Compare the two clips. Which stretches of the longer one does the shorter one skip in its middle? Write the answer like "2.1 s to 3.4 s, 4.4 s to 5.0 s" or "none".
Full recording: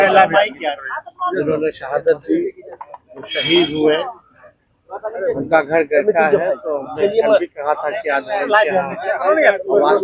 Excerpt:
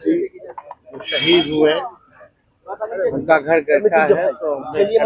none